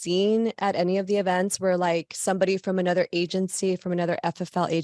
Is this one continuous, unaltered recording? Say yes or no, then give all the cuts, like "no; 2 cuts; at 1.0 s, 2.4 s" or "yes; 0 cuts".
yes; 0 cuts